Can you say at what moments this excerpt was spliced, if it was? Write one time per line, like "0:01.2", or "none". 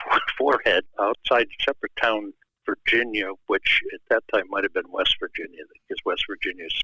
0:00.9